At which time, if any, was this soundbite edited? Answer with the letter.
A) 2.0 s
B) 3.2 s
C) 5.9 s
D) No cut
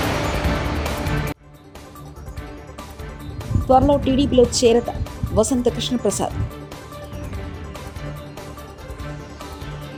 D